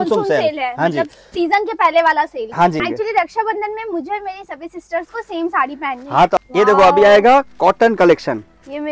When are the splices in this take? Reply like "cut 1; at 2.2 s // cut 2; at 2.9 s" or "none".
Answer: cut 1; at 2.8 s // cut 2; at 6.4 s